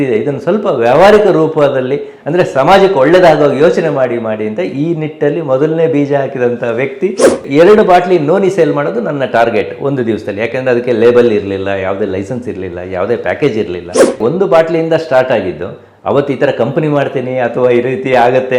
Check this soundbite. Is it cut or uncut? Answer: cut